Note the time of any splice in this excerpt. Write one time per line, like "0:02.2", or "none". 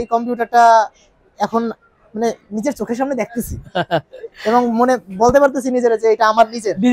none